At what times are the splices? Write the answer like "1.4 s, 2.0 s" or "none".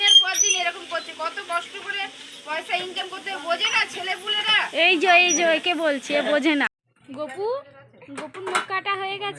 6.9 s